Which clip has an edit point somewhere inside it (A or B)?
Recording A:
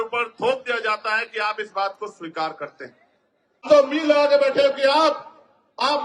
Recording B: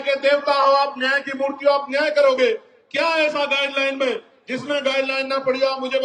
A